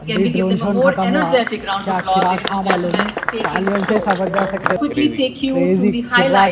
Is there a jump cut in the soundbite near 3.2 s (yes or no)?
yes